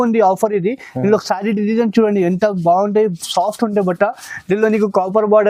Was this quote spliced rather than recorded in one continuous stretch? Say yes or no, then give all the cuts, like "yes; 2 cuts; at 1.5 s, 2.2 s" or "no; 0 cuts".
no; 0 cuts